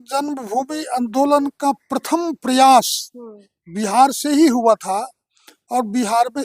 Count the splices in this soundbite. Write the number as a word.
zero